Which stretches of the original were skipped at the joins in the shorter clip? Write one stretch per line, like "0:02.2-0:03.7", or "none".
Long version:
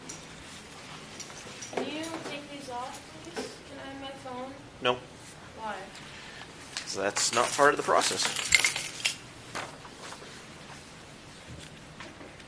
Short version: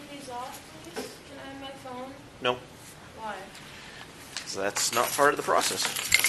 none